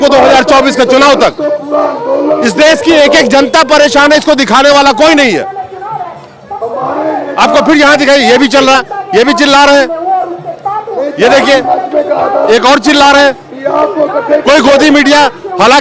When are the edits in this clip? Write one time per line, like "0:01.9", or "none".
none